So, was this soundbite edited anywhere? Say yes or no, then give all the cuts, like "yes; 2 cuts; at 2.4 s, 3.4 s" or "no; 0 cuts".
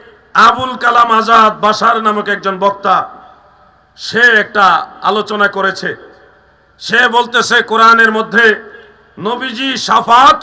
no; 0 cuts